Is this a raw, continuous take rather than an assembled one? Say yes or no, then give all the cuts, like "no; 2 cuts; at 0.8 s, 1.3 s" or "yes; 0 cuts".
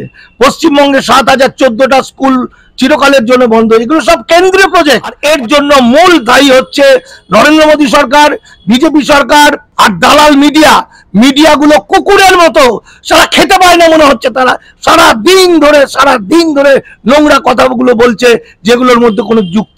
no; 2 cuts; at 5.1 s, 9.6 s